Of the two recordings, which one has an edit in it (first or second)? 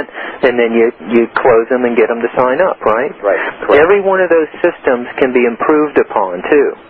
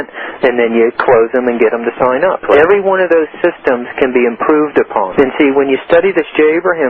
second